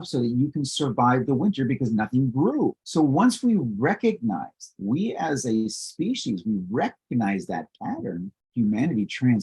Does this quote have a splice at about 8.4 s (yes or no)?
yes